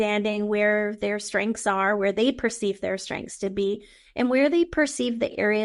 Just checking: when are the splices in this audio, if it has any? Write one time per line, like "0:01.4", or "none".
none

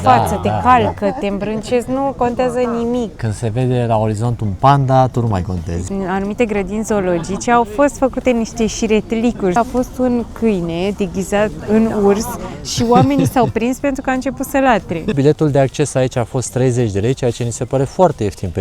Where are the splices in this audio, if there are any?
0:03.2
0:05.9
0:09.6
0:11.6
0:15.1

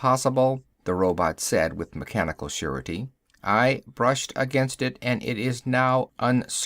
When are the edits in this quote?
0:05.6

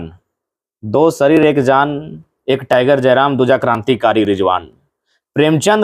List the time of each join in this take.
none

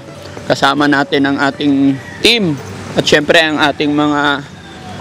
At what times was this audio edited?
none

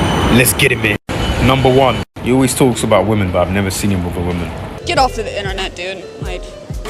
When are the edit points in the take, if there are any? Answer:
0:04.8

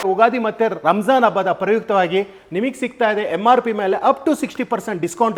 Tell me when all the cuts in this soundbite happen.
none

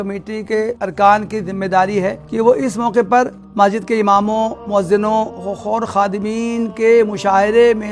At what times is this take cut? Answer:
0:00.8
0:02.2
0:03.4
0:04.6
0:05.4

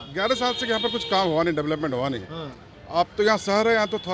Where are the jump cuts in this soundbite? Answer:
none

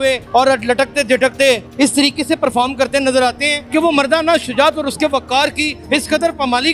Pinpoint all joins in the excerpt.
none

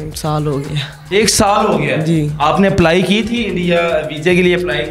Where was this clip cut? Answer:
none

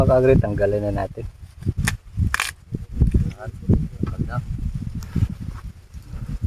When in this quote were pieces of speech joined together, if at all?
0:01.8

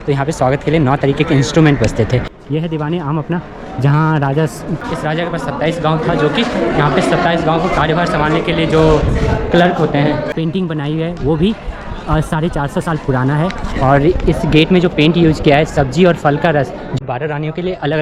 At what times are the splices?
0:02.3
0:04.9
0:10.3
0:17.0

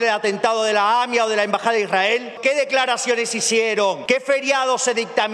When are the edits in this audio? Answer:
0:02.4
0:04.0

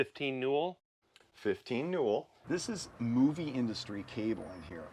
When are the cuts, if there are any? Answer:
0:02.3

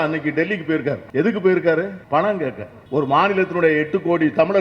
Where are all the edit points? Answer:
0:01.0
0:02.0
0:02.7

